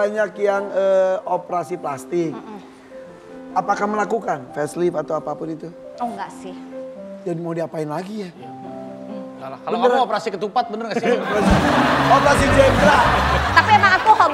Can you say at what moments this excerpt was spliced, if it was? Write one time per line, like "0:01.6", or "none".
none